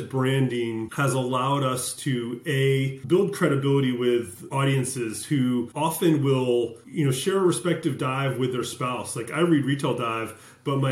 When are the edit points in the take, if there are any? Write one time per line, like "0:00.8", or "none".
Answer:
0:00.9
0:03.0
0:04.4
0:05.7
0:06.8